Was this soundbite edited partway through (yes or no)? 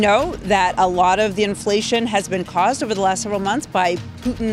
no